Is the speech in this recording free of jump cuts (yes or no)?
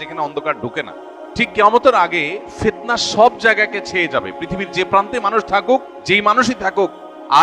no